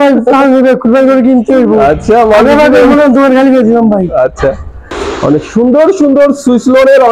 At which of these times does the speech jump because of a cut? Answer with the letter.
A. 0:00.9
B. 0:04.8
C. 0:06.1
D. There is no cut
B